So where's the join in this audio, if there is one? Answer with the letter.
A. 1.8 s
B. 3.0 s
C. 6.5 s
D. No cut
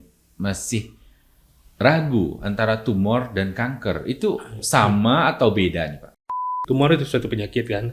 C